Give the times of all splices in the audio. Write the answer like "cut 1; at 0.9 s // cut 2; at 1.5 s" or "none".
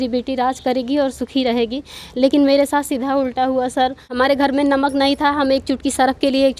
cut 1; at 4.0 s